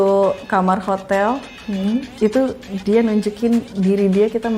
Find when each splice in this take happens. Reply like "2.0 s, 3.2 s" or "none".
none